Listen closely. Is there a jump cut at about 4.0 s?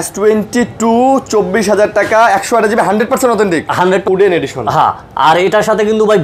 yes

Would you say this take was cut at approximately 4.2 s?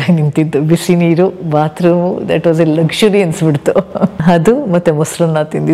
yes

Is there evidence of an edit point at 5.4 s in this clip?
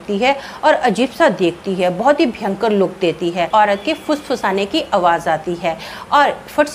no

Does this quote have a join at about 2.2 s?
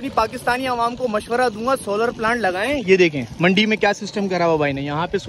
no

